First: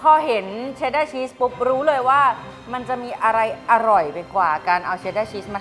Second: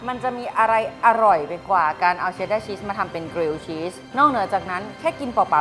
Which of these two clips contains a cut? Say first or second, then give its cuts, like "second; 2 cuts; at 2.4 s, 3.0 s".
second; 1 cut; at 4.0 s